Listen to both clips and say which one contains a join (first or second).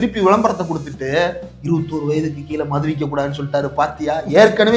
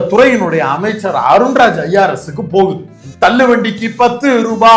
second